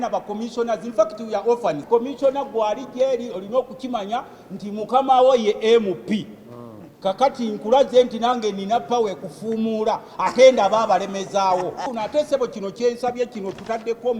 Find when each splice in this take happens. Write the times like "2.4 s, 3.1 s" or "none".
1.8 s, 11.9 s